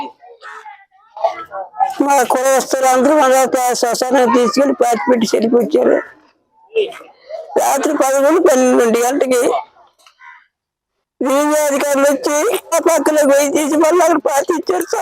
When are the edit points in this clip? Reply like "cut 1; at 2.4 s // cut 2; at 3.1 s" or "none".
cut 1; at 12.7 s